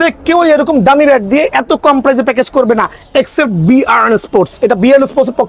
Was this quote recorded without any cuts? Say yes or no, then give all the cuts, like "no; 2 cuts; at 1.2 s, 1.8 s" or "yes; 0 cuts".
yes; 0 cuts